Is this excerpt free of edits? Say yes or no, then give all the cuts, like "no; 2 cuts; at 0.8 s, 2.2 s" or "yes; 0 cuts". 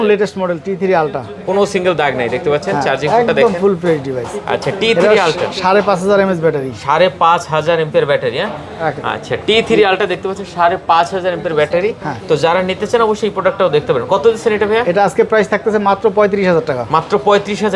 yes; 0 cuts